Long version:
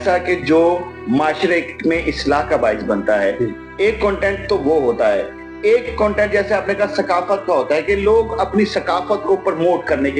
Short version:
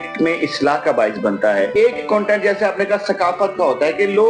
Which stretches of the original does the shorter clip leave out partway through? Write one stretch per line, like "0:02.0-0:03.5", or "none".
0:03.3-0:05.6